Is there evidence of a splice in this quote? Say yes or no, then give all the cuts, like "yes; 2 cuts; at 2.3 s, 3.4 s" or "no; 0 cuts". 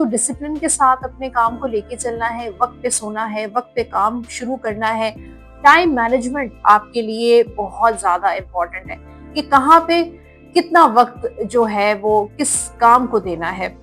no; 0 cuts